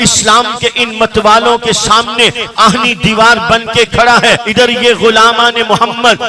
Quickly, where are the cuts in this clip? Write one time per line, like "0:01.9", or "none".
0:04.4